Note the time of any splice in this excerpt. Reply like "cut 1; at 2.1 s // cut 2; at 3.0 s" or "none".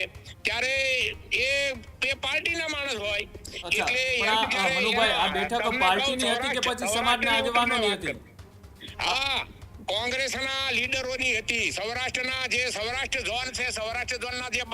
none